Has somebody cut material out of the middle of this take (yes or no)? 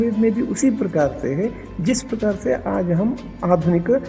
no